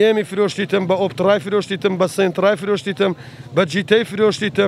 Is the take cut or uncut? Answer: uncut